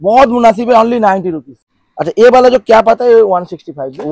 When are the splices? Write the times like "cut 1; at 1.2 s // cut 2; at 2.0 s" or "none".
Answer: cut 1; at 1.5 s

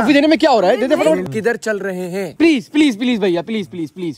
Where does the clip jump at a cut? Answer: cut 1; at 1.2 s

